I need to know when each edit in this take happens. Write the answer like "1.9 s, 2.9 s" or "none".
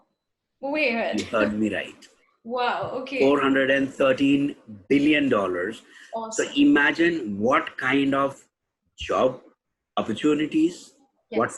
none